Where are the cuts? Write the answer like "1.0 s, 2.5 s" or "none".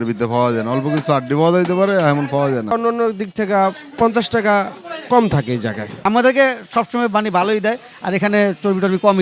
2.7 s, 6.0 s